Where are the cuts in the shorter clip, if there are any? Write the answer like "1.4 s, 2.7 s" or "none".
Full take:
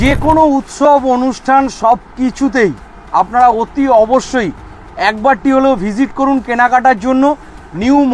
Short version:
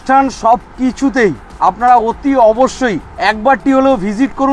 1.5 s, 3.1 s